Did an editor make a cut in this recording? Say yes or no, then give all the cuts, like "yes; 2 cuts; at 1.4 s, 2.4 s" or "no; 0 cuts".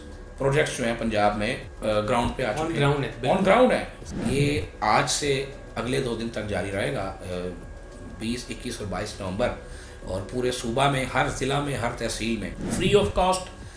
yes; 3 cuts; at 1.7 s, 4.0 s, 12.6 s